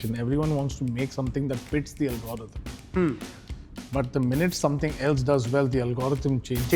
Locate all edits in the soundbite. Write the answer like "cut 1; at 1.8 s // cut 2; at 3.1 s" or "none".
none